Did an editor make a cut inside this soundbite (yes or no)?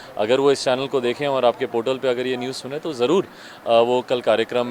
no